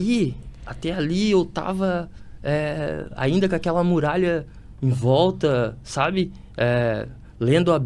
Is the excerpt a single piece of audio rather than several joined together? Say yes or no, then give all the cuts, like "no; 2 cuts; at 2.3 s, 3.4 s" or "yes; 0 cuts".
yes; 0 cuts